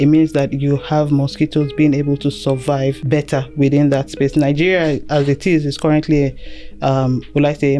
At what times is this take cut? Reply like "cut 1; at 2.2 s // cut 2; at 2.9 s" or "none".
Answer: cut 1; at 3.0 s

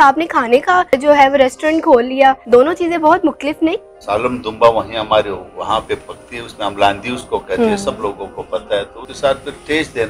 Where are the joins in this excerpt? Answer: cut 1; at 0.9 s // cut 2; at 2.4 s // cut 3; at 3.9 s // cut 4; at 9.0 s

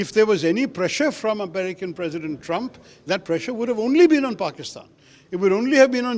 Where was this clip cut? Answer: none

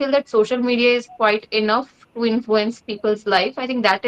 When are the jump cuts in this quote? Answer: none

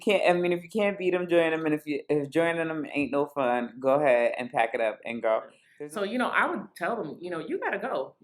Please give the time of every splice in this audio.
cut 1; at 5.6 s

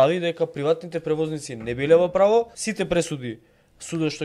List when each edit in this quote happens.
cut 1; at 2.6 s

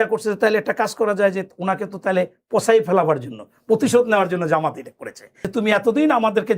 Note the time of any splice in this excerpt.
cut 1; at 5.3 s

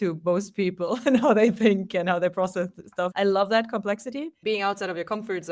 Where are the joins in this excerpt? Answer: cut 1; at 1.0 s // cut 2; at 3.1 s // cut 3; at 4.3 s

